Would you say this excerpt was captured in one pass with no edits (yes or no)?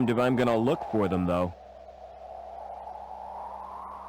no